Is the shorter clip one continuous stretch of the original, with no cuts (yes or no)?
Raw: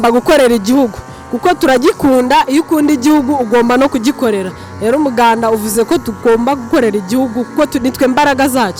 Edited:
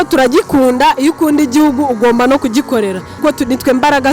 no